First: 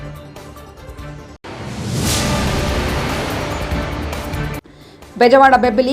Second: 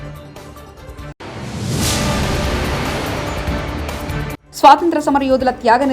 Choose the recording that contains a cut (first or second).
first